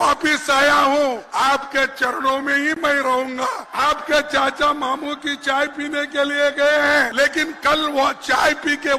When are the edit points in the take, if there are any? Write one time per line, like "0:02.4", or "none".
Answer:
0:01.2
0:03.7
0:07.1